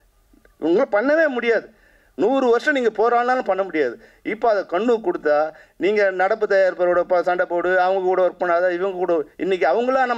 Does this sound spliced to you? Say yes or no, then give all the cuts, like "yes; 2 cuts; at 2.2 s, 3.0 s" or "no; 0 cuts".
no; 0 cuts